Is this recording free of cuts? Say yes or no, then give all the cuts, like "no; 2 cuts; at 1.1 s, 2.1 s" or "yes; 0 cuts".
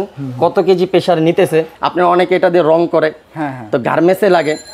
no; 1 cut; at 1.8 s